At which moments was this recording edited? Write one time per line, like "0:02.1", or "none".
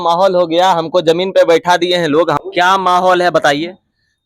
0:02.4